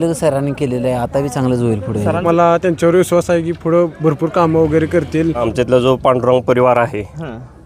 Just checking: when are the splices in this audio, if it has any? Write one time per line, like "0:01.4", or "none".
0:02.2
0:05.4